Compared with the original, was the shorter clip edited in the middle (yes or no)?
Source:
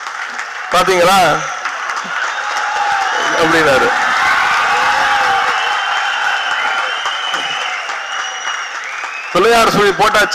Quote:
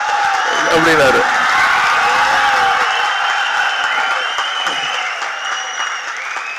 no